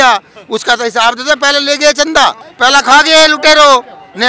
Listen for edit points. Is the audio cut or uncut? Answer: cut